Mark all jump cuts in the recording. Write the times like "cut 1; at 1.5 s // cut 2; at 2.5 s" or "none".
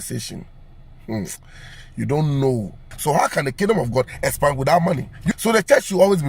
cut 1; at 2.8 s // cut 2; at 5.3 s